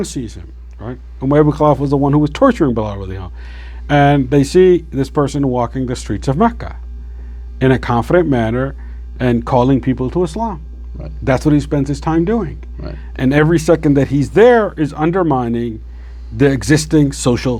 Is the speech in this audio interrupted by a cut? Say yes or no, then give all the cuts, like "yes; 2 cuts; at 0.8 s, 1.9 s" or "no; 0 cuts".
no; 0 cuts